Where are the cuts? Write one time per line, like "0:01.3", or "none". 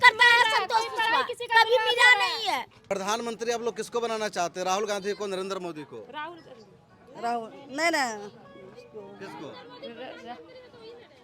0:02.7